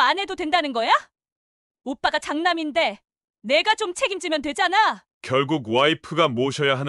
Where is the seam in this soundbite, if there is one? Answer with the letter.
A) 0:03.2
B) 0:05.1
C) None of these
B